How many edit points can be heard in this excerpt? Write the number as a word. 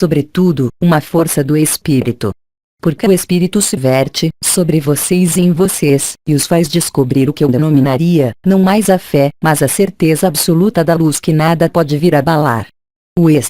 one